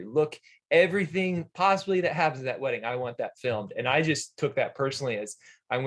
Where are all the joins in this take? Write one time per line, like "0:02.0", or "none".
none